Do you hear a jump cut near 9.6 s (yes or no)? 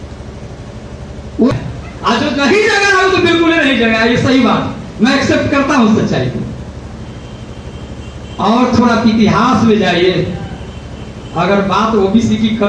no